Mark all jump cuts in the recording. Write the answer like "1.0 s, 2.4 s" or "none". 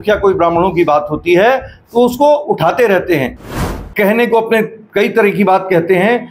3.4 s